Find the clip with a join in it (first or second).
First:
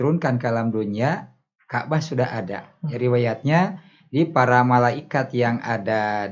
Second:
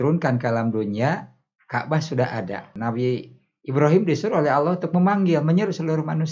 second